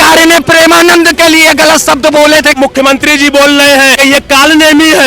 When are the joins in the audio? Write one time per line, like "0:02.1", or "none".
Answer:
0:02.6
0:03.9